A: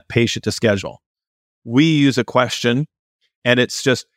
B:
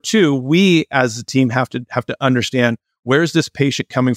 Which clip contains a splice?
A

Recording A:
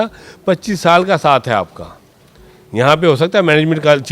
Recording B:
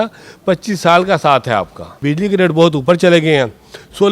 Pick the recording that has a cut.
B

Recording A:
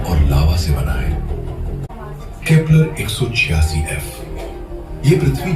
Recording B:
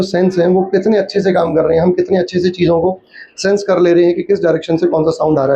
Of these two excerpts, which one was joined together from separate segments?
A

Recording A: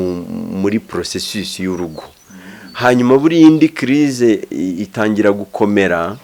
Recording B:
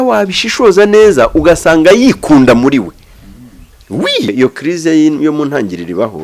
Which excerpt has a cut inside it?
B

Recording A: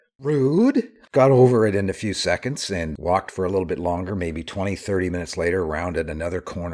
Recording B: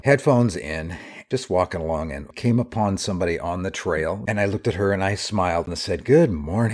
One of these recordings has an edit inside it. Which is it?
B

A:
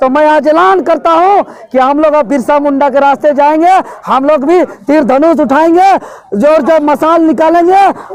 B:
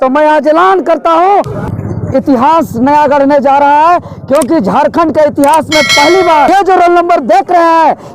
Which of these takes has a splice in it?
B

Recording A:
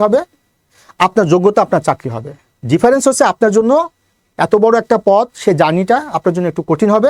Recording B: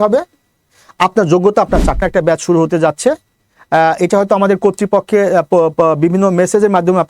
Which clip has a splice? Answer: B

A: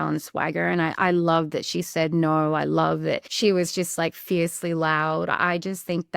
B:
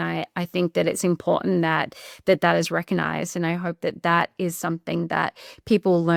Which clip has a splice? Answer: A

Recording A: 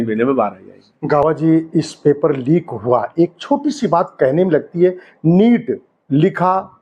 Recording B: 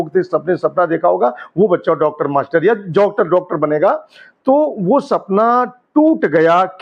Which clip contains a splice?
A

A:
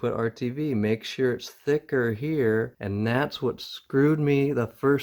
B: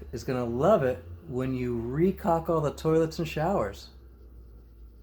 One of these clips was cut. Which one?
A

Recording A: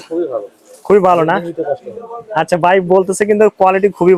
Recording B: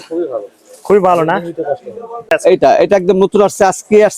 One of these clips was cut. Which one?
B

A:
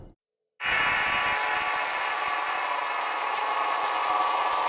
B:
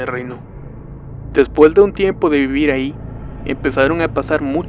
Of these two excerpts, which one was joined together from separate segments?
A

